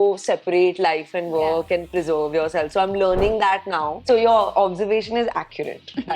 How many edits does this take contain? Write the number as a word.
one